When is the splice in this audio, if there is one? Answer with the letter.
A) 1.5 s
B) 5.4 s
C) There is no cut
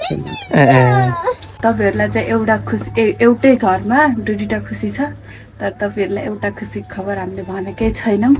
A